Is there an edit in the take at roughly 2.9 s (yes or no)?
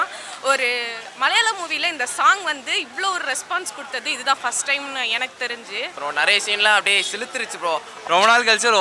no